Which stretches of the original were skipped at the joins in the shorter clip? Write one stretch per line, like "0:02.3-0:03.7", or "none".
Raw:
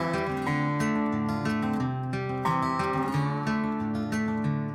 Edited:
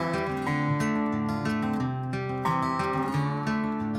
none